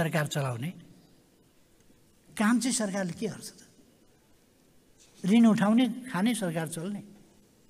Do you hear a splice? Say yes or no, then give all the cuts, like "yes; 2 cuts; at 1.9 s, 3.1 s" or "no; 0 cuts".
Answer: no; 0 cuts